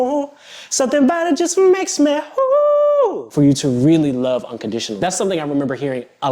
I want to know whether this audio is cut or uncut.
cut